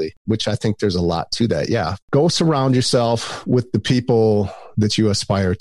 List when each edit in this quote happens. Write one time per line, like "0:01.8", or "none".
none